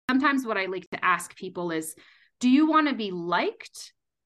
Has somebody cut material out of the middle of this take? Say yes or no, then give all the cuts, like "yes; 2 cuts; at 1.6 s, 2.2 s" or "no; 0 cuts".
yes; 1 cut; at 0.9 s